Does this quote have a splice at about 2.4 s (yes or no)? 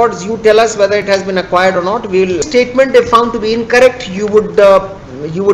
yes